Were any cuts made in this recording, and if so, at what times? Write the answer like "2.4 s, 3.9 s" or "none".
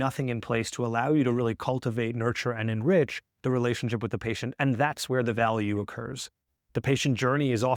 6.6 s